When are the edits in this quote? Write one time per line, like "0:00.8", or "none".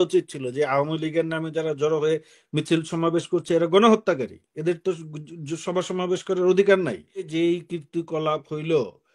0:07.3